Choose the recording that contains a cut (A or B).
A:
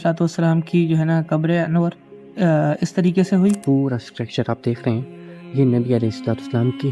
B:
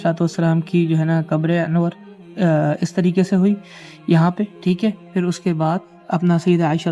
A